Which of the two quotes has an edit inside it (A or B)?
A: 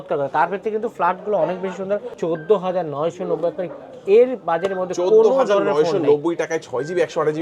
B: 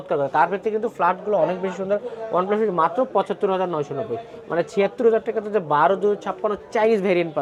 A